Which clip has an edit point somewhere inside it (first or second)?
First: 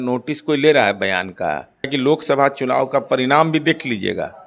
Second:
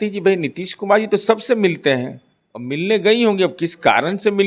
first